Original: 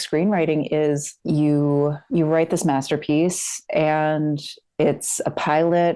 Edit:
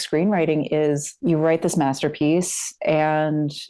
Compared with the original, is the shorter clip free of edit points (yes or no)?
no